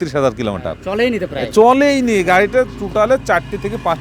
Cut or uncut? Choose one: uncut